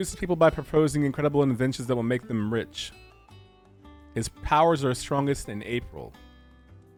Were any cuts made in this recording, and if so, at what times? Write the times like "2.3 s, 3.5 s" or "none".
none